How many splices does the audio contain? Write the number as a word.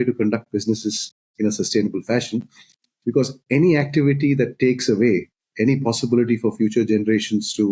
zero